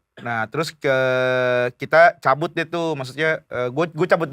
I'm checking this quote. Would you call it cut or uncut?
uncut